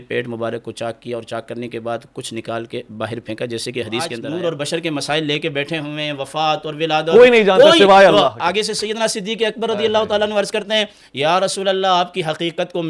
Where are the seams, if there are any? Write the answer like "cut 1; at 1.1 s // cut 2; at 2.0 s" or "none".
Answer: cut 1; at 4.2 s